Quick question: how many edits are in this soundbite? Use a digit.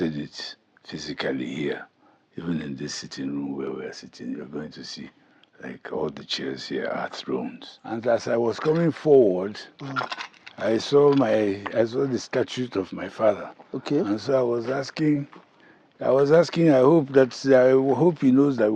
1